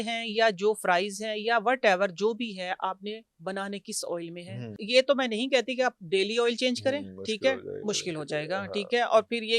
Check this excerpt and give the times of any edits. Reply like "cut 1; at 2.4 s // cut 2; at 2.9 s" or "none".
cut 1; at 4.8 s